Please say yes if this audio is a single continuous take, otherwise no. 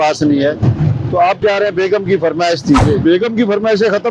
no